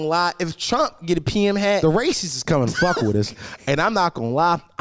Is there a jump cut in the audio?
yes; 1 cut; at 1.8 s

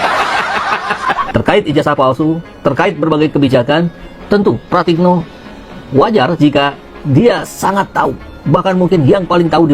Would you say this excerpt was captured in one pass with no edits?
no; 1 cut; at 0.9 s

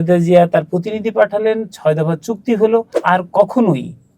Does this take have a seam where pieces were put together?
yes; 1 cut; at 2.9 s

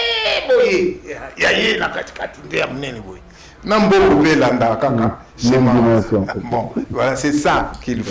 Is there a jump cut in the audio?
no; 0 cuts

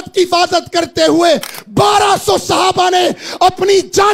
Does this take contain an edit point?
no; 0 cuts

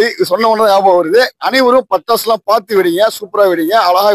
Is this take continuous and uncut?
yes; 0 cuts

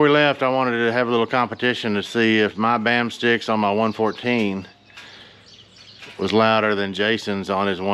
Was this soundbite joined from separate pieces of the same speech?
no; 0 cuts

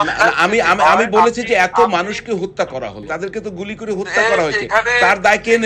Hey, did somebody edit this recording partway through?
yes; 1 cut; at 3.1 s

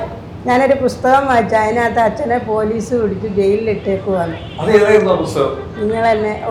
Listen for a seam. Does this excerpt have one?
no; 0 cuts

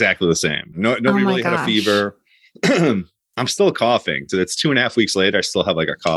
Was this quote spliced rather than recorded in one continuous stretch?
no; 0 cuts

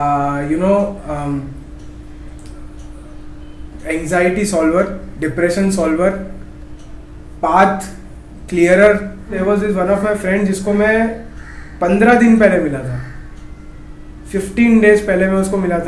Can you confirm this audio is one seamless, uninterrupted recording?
no; 1 cut; at 9.4 s

